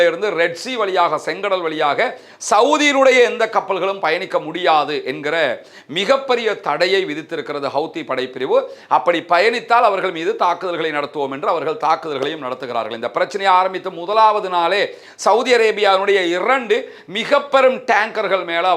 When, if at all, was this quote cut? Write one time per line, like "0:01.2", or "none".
none